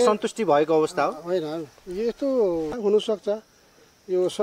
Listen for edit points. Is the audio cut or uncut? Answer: cut